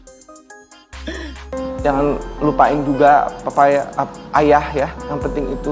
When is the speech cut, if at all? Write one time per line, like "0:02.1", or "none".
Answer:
0:01.5